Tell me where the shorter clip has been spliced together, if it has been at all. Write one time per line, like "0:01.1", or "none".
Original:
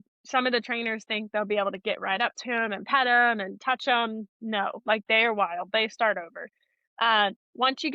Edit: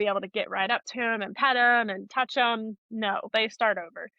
0:03.3